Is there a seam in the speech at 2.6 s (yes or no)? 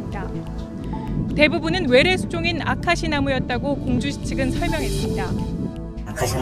no